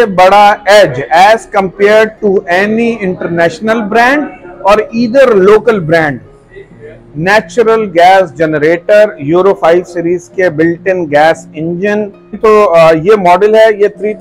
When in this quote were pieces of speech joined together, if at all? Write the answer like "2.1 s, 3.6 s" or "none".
12.4 s